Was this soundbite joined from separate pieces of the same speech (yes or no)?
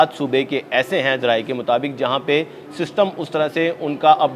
no